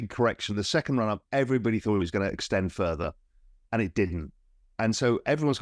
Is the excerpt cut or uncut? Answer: uncut